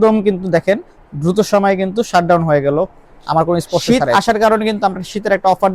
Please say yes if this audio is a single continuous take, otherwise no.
no